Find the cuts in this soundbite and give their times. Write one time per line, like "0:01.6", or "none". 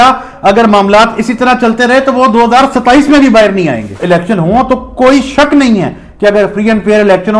0:03.9